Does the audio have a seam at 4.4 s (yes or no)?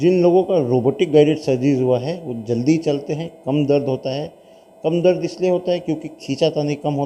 no